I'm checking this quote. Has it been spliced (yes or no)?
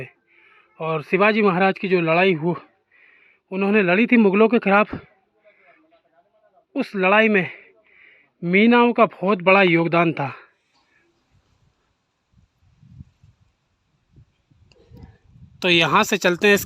yes